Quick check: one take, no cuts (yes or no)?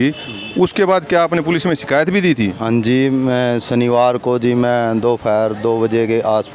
yes